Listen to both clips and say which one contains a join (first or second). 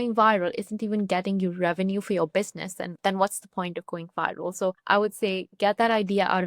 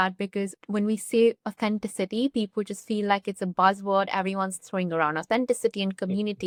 first